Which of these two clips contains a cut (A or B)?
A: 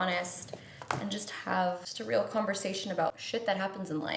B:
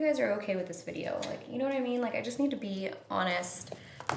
A